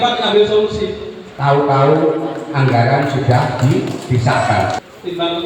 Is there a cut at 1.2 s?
yes; 2 cuts; at 1.2 s, 4.8 s

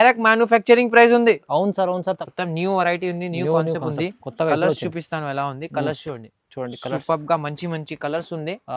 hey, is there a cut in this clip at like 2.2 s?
yes; 1 cut; at 2.2 s

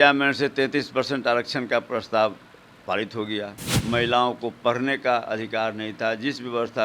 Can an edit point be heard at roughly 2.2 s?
no; 1 cut; at 3.7 s

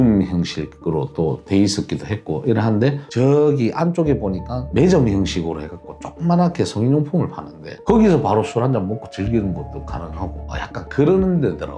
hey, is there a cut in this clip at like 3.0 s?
yes; 1 cut; at 3.0 s

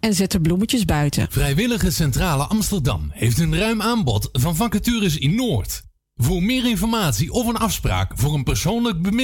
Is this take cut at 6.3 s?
no; 1 cut; at 1.3 s

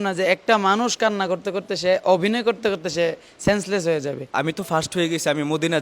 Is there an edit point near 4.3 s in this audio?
yes; 1 cut; at 4.3 s

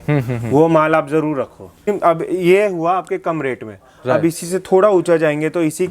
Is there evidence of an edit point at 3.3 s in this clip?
no; 1 cut; at 1.9 s

